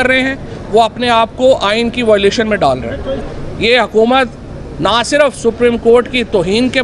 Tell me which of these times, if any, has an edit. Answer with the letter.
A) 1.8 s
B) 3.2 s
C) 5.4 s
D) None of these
B